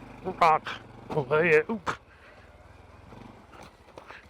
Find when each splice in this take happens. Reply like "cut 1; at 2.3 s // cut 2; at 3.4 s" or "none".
cut 1; at 3.1 s